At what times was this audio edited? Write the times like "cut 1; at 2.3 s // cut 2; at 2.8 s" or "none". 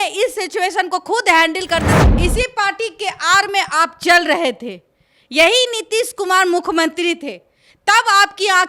cut 1; at 2.0 s